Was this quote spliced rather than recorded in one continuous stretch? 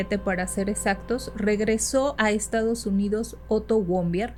no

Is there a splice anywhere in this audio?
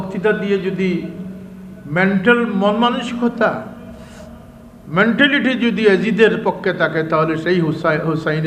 no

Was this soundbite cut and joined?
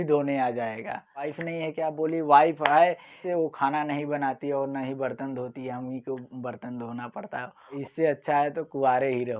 yes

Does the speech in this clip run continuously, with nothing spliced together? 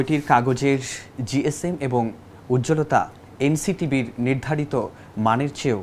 yes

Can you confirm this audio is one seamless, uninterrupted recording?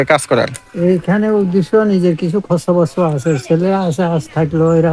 yes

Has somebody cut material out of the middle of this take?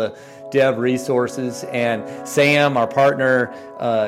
no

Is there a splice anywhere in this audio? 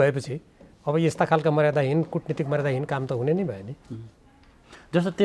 no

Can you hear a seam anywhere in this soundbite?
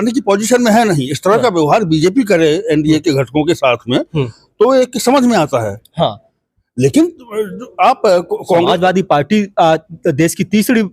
no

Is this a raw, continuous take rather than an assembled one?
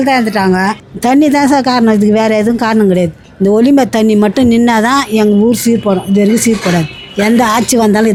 yes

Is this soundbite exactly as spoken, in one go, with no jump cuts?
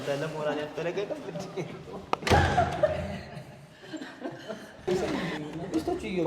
no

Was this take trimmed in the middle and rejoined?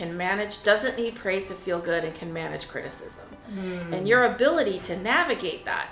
no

